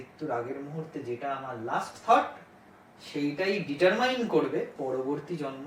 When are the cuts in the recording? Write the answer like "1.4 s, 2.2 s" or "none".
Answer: 4.7 s